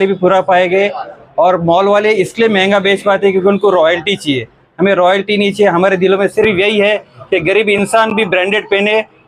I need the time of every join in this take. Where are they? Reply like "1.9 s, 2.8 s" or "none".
none